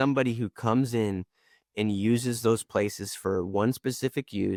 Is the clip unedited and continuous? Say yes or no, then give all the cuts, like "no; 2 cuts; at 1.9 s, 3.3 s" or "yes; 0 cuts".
yes; 0 cuts